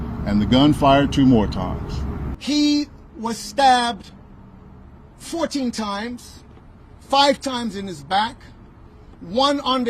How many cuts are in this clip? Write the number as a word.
one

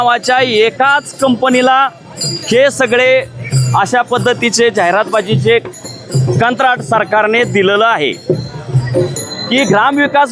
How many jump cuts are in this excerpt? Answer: one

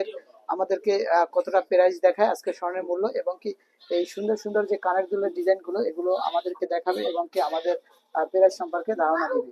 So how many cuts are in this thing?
zero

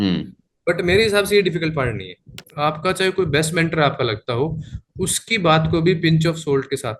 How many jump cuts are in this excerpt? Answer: one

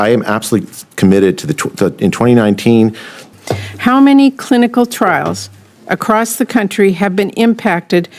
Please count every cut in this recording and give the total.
one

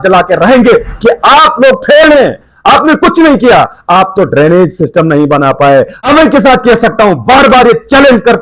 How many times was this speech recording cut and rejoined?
one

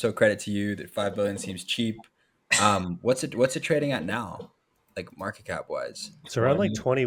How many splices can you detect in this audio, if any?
zero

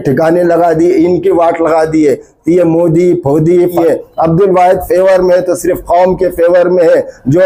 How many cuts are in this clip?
one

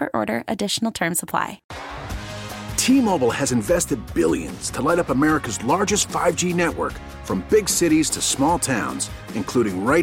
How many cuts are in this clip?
one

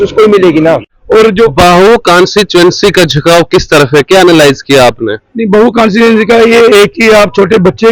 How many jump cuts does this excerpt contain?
one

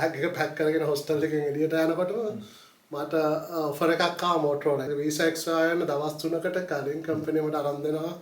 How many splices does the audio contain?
one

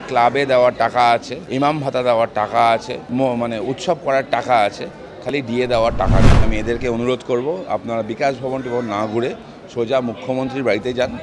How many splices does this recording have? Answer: three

